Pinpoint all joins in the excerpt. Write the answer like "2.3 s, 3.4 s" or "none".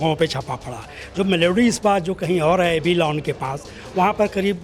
none